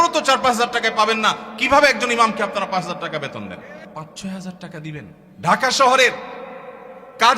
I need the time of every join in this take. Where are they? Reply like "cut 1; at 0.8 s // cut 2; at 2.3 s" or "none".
cut 1; at 3.8 s // cut 2; at 5.2 s